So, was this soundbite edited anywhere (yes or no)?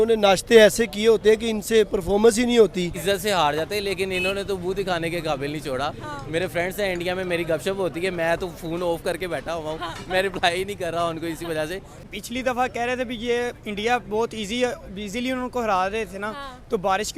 yes